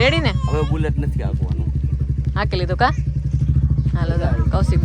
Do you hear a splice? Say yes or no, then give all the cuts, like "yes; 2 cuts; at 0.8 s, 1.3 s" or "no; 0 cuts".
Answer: no; 0 cuts